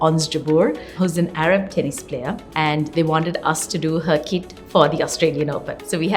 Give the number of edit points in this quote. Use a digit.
2